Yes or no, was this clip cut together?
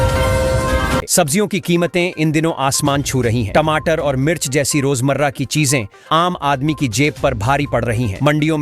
no